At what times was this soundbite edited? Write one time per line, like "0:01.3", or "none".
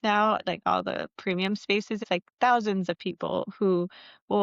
0:02.0